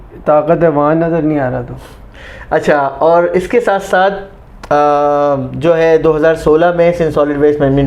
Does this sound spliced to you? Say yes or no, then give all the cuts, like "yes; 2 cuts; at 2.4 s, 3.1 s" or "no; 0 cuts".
no; 0 cuts